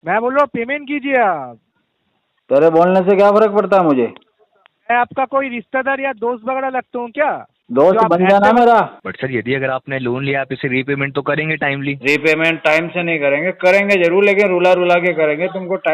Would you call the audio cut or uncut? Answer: cut